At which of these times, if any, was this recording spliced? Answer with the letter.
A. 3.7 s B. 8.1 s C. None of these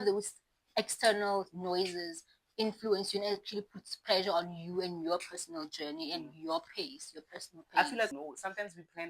B